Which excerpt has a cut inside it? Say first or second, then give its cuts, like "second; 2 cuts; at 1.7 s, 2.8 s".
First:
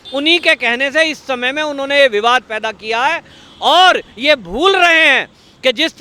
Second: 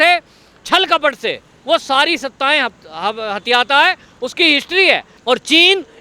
second; 1 cut; at 5.1 s